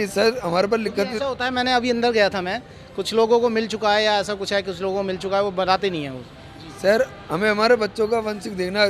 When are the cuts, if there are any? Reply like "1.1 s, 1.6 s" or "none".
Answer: none